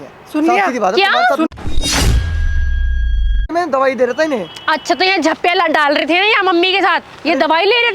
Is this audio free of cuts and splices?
no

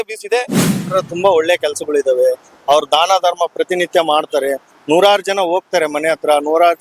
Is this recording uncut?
no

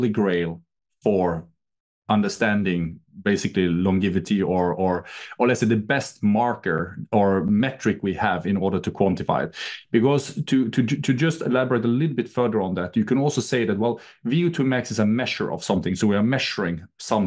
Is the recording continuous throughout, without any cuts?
yes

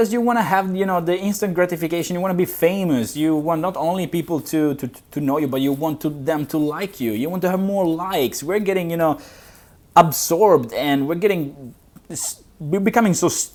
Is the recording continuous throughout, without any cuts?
yes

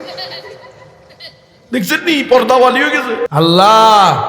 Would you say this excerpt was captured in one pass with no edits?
no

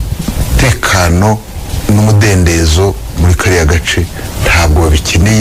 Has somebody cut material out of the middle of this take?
no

